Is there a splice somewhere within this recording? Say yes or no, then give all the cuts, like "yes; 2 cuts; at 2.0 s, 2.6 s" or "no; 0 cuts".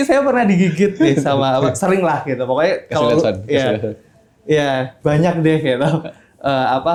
no; 0 cuts